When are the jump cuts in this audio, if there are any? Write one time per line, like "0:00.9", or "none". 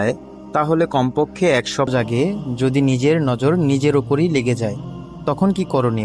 0:01.9